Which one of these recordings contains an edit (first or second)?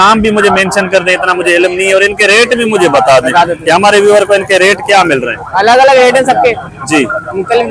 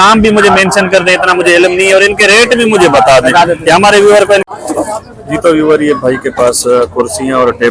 second